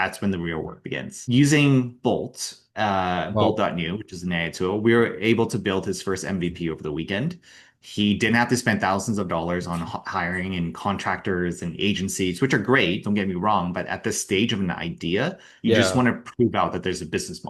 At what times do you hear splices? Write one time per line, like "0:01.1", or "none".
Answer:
0:01.2